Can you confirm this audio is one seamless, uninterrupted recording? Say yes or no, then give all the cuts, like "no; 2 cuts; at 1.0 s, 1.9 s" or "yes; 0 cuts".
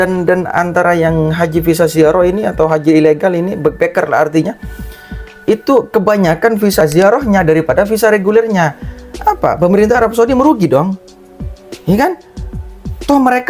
yes; 0 cuts